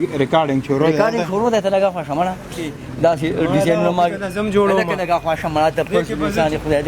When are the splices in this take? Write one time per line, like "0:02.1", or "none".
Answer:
0:02.7